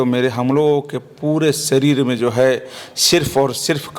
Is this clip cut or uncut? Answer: uncut